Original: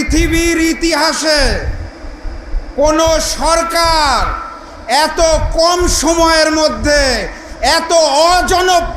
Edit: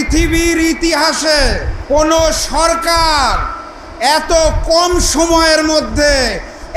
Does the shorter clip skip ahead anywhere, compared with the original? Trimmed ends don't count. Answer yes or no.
yes